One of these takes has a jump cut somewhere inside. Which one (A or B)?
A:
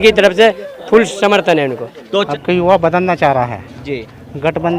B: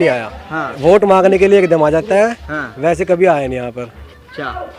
A